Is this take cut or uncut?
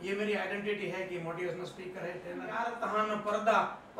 cut